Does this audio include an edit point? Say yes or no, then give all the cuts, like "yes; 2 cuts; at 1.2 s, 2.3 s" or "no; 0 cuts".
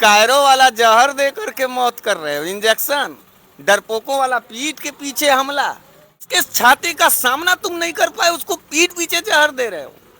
yes; 1 cut; at 6.3 s